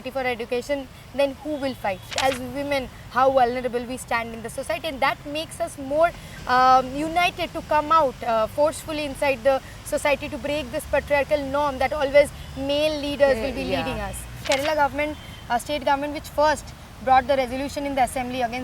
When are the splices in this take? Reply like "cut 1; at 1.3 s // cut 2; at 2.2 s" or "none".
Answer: cut 1; at 2.2 s // cut 2; at 14.4 s